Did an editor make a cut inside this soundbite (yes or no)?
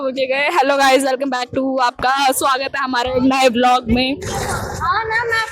no